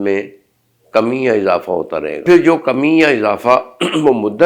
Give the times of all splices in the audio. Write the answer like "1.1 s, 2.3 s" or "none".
2.2 s